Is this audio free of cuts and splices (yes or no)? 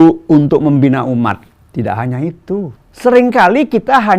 no